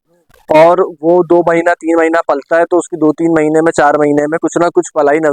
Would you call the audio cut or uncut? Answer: uncut